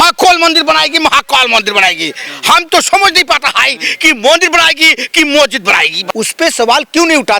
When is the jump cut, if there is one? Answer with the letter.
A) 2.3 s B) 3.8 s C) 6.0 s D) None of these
C